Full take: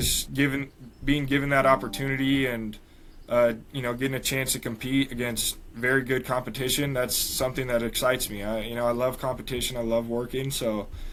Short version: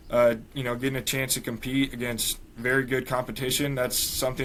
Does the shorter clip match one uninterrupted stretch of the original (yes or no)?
yes